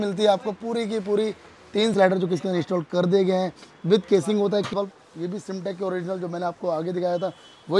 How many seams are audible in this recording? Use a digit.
2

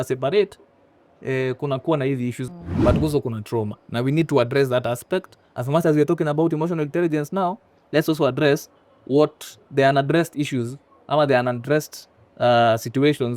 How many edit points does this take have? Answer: 1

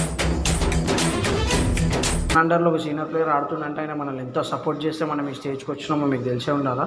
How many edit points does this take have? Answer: 0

